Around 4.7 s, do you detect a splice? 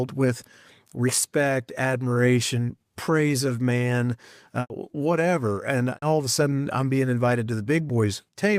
yes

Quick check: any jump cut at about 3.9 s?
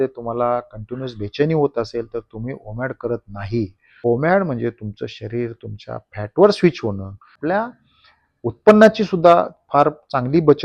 yes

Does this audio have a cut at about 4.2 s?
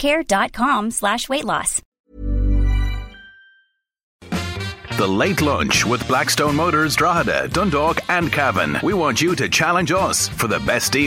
yes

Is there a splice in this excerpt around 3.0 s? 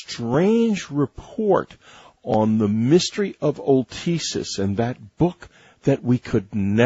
no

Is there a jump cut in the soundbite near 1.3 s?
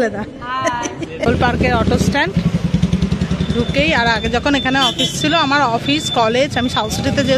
yes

